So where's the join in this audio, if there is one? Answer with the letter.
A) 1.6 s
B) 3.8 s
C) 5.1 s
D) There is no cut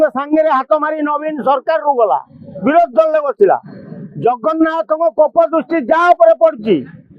D